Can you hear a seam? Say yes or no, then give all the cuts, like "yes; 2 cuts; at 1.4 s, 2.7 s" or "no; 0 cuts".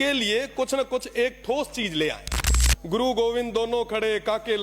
yes; 1 cut; at 2.3 s